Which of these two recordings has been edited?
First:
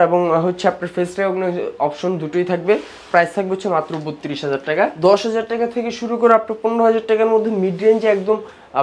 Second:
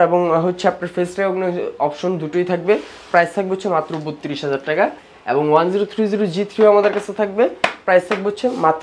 first; 1 cut; at 4.9 s

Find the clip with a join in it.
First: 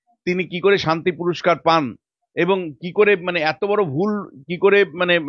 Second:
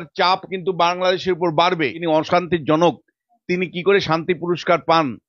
second; 1 cut; at 2.0 s

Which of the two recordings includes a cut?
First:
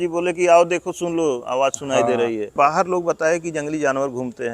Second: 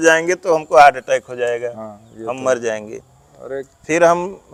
first; 1 cut; at 2.5 s

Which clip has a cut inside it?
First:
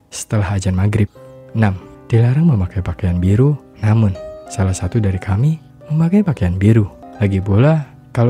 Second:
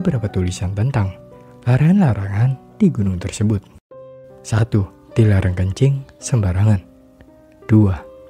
first; 1 cut; at 7.0 s

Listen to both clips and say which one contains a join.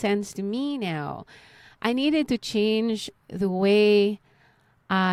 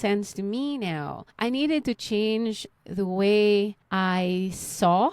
second; 2 cuts; at 1.2 s, 3.8 s

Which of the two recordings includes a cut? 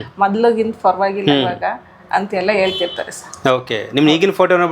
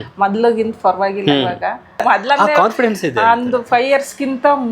second; 1 cut; at 2.0 s

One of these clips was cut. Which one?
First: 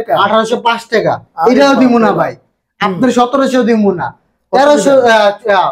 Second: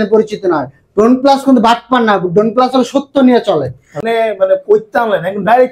second; 1 cut; at 3.9 s

